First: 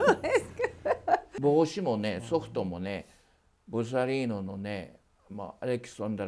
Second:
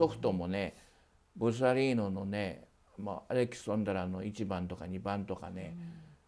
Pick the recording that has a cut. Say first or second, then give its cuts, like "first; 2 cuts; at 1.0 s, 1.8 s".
first; 1 cut; at 1.3 s